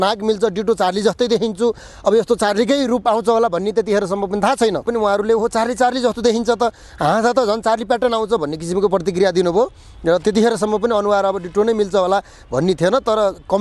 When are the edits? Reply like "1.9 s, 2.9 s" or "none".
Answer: 4.9 s